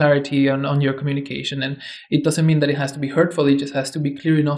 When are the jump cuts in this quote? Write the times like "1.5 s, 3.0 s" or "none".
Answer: none